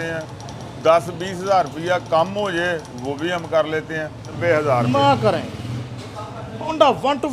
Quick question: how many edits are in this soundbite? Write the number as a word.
one